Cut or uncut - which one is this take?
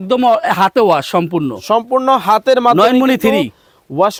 uncut